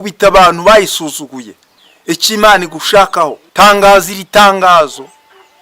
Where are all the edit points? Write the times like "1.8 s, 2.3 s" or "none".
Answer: 3.4 s